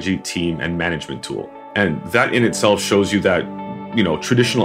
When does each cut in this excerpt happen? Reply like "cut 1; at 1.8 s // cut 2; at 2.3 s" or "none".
cut 1; at 1.6 s

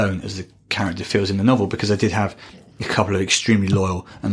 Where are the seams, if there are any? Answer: none

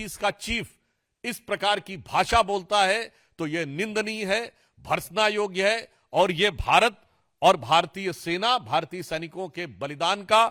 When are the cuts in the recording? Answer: none

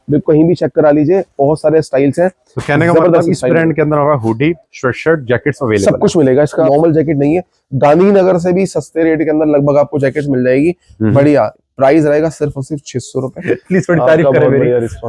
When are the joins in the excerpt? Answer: cut 1; at 6.7 s // cut 2; at 13.4 s

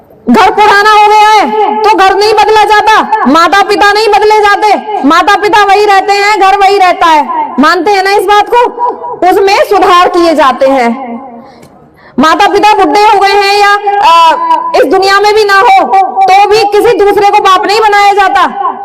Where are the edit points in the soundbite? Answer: none

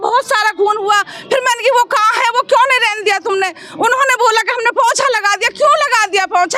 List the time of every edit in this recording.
none

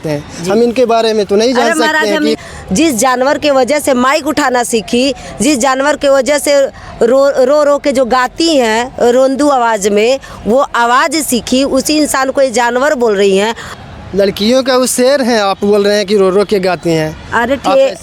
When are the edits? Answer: cut 1; at 2.4 s // cut 2; at 13.7 s

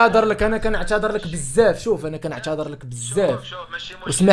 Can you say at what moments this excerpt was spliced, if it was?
none

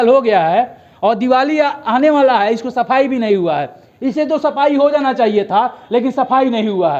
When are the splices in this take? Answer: none

